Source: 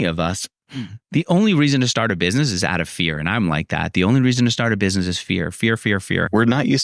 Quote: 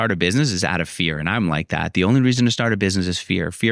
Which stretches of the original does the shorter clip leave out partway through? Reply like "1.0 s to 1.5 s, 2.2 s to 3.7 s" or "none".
none

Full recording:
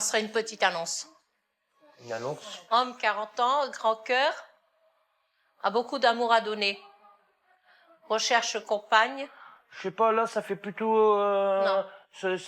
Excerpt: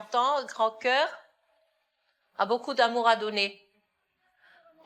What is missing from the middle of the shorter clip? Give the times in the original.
none

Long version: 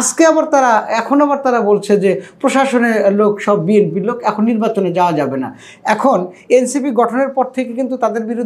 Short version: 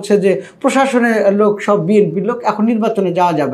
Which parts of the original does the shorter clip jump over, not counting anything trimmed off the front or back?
none

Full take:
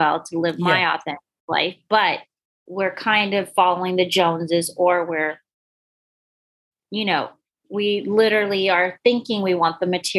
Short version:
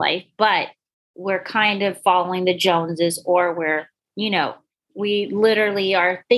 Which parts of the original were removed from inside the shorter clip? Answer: 5.5 s to 6.7 s

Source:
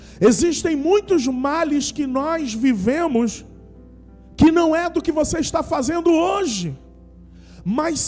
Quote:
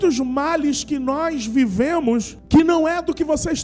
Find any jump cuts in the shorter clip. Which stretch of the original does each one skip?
3.4 s to 4.2 s

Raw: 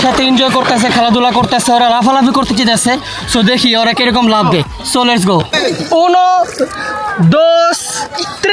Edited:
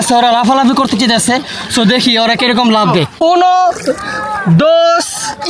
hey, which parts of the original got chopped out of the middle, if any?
4.7 s to 5.9 s

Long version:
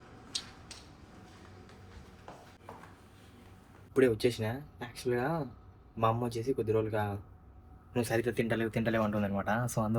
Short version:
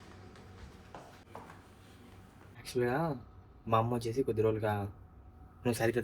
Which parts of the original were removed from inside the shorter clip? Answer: 3.7 s to 4.7 s

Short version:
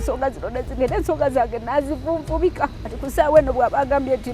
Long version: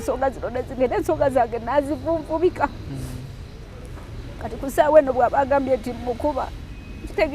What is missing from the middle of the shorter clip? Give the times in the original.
2.9 s to 4.5 s

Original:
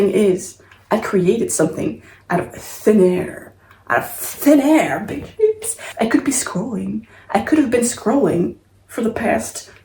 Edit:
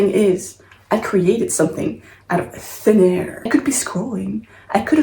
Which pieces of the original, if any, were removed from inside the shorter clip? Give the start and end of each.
3.5 s to 6.1 s

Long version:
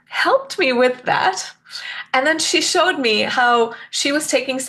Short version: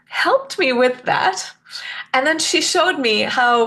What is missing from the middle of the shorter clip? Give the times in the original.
none

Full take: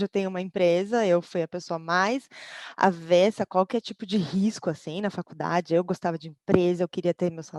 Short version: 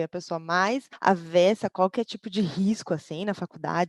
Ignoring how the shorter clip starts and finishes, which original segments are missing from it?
2.3 s to 2.7 s

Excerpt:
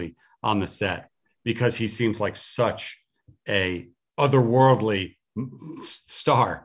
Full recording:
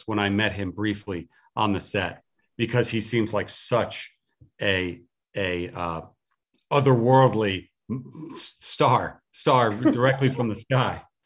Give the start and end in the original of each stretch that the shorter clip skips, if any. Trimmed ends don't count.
5.1 s to 6.5 s

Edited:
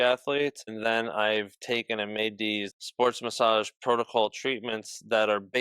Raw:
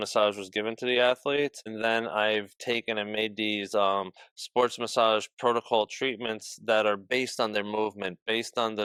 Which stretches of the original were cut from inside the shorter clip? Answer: 3.6 s to 4.2 s

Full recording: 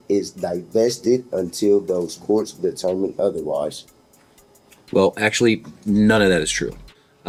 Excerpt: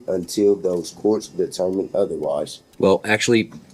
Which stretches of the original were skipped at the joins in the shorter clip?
3.9 s to 4.7 s

